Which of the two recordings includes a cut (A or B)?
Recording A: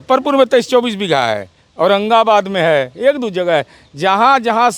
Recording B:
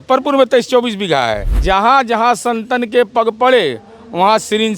B